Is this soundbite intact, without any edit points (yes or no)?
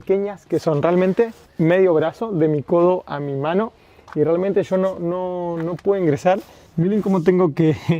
no